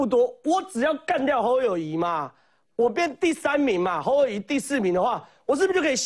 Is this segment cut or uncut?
uncut